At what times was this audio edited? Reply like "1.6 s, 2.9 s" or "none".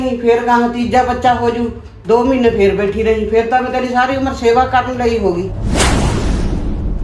5.5 s